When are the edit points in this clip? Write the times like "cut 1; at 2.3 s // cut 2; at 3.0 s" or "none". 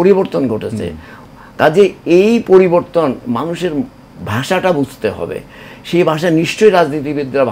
none